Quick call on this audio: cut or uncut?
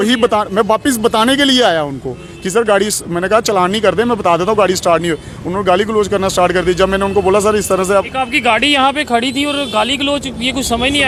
uncut